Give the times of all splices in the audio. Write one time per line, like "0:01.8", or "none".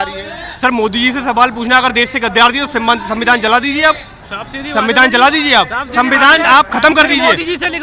none